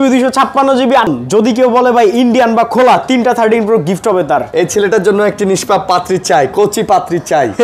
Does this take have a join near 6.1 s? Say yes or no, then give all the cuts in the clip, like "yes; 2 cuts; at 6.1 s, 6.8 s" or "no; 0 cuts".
no; 2 cuts; at 1.1 s, 4.5 s